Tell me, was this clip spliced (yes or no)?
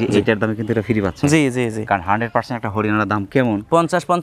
no